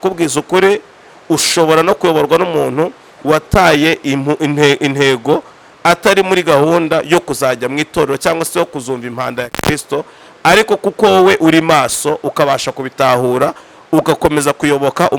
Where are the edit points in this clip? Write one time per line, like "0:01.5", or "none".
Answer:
none